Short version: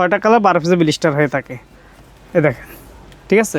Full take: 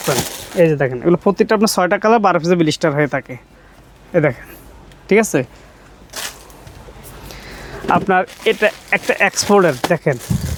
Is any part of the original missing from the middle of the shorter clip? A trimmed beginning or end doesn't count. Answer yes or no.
no